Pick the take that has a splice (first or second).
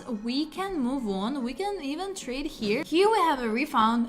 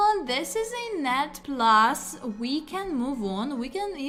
first